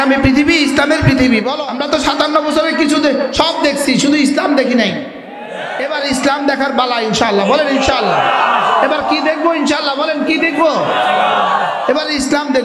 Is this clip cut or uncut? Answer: cut